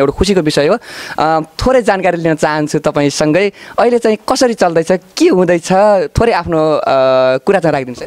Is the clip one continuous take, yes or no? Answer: yes